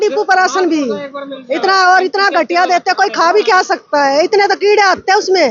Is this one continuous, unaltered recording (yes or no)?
yes